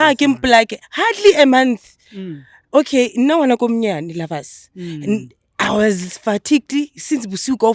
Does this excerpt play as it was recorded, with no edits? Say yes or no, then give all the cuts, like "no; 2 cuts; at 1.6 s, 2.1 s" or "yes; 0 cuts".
yes; 0 cuts